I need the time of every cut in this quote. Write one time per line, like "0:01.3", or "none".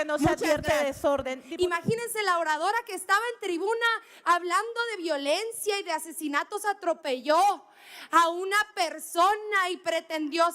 0:01.4